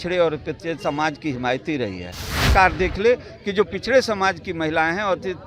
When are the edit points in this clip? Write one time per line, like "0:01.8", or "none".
0:02.4